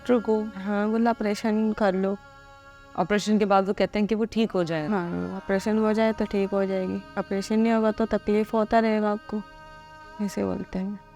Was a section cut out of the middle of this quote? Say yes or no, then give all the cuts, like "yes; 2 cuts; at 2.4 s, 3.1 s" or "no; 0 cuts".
no; 0 cuts